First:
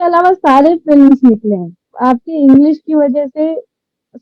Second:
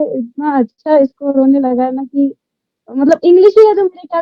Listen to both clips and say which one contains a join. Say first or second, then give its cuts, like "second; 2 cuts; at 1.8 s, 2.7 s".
first; 1 cut; at 1.9 s